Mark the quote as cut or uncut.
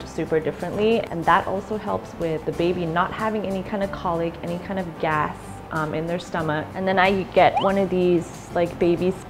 cut